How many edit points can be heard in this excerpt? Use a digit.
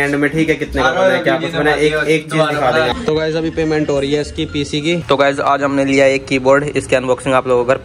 2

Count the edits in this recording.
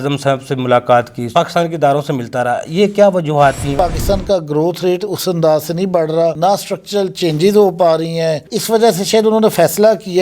2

